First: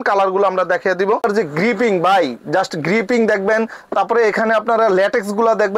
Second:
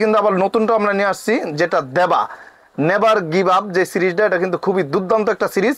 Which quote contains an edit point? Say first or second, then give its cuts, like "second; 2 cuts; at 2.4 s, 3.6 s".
first; 1 cut; at 1.2 s